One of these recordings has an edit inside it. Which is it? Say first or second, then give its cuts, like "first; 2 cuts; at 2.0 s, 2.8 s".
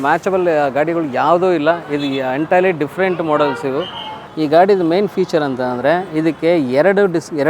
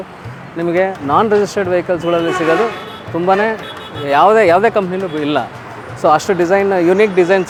first; 1 cut; at 4.2 s